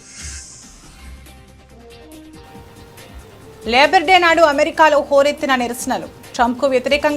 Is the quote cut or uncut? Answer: uncut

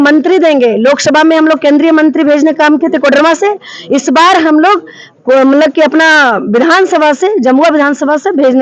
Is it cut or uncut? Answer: uncut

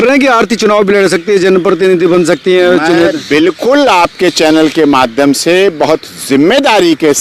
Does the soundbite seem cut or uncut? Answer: uncut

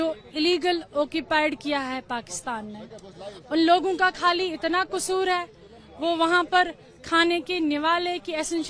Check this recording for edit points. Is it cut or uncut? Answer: uncut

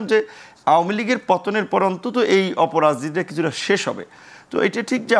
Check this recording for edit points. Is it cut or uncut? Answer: uncut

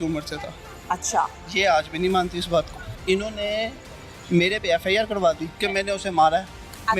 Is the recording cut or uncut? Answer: cut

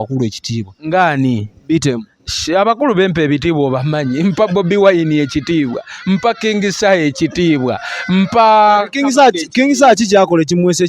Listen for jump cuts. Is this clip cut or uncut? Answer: uncut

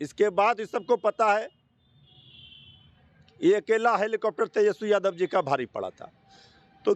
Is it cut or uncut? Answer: uncut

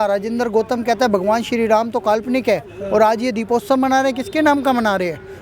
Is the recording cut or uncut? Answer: uncut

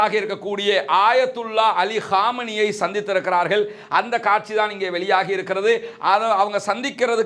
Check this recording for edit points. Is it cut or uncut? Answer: uncut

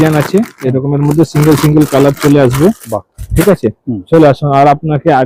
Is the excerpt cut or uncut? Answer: uncut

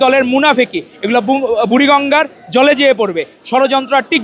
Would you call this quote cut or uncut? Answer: uncut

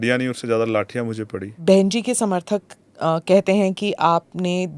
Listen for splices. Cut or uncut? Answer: cut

